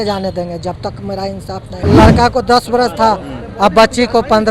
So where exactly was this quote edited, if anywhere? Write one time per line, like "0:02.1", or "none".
0:01.8